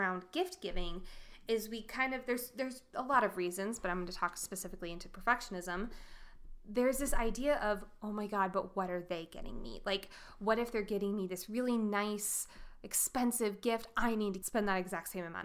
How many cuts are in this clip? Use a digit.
1